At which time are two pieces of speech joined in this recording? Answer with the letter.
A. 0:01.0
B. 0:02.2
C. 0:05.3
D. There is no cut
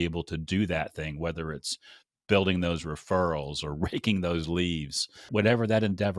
C